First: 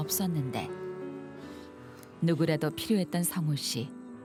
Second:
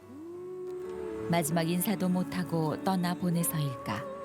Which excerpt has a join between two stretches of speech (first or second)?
second